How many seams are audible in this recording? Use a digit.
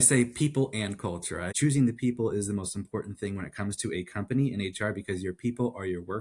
1